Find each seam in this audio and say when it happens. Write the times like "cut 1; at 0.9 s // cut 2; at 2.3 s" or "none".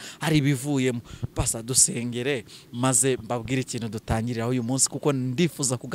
none